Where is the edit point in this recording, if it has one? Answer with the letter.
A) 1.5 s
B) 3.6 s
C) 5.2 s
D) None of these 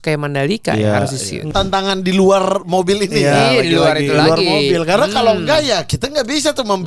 A